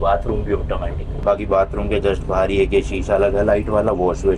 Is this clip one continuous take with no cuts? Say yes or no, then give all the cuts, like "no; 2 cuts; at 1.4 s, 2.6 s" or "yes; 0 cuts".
yes; 0 cuts